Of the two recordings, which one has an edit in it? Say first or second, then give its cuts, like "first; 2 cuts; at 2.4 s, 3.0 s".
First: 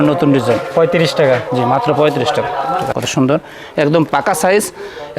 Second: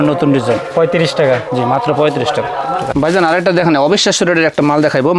first; 1 cut; at 2.9 s